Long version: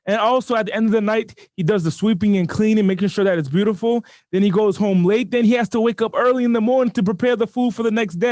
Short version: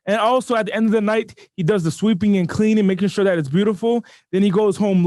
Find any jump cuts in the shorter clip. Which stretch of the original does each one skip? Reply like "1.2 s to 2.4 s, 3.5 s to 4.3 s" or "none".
none